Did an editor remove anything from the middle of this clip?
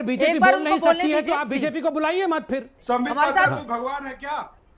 no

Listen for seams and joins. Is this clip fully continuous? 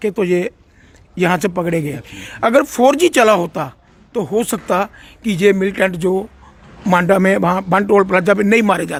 yes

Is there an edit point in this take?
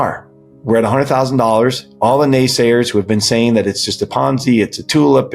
no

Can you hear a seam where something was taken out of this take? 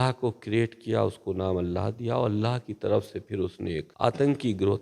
yes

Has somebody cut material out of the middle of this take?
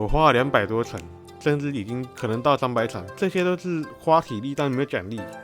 yes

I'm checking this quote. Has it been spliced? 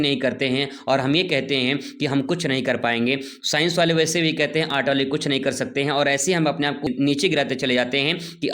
yes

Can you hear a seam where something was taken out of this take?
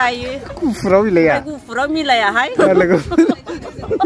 yes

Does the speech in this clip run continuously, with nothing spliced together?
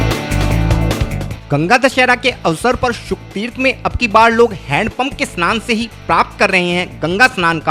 no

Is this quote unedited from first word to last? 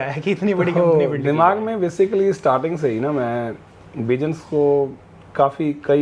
yes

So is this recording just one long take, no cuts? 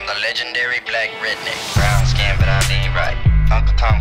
no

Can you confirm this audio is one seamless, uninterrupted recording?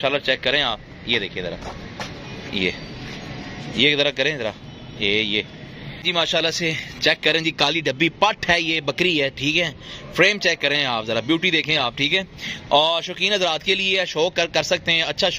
no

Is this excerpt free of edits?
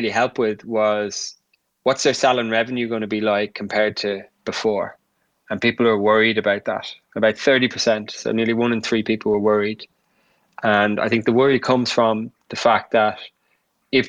yes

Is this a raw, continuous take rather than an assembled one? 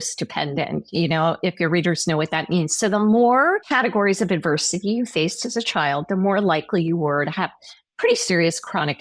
no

